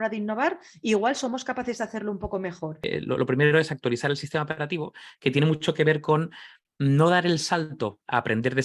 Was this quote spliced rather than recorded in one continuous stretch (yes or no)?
yes